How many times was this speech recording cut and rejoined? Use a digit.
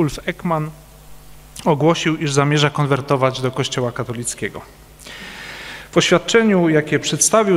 1